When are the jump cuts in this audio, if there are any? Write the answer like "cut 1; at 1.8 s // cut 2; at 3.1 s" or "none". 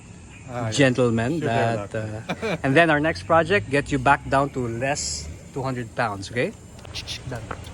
cut 1; at 2.4 s // cut 2; at 6.8 s

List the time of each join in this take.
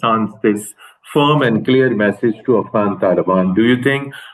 none

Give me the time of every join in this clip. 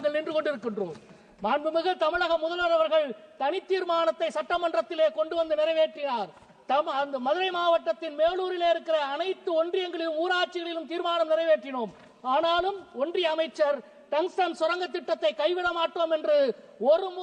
none

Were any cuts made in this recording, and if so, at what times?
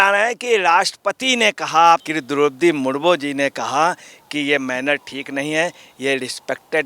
cut 1; at 2.1 s

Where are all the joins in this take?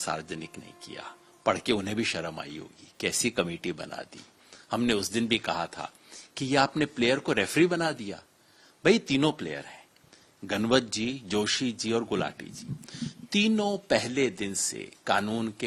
none

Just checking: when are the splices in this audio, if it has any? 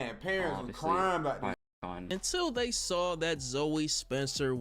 cut 1; at 2.0 s

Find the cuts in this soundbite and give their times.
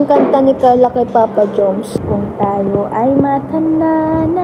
cut 1; at 1.9 s

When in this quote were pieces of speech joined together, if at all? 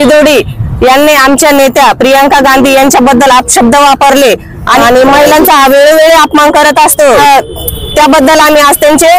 cut 1; at 4.8 s // cut 2; at 7.2 s

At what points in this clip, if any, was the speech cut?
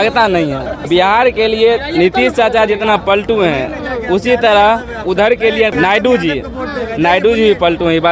cut 1; at 0.8 s // cut 2; at 5.7 s

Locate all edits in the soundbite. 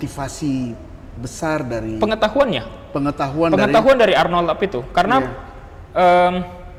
none

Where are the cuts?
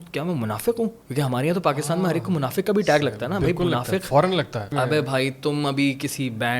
cut 1; at 1.0 s // cut 2; at 4.7 s

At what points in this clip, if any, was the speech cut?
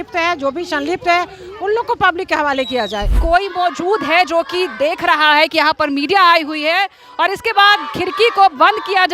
cut 1; at 3.2 s

